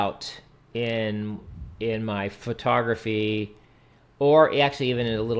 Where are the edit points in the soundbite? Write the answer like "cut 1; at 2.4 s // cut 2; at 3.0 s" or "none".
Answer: none